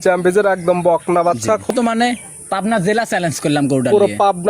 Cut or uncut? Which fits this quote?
cut